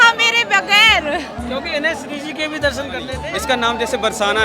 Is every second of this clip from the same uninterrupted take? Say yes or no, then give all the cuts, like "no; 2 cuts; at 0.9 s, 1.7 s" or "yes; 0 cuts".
no; 1 cut; at 3.2 s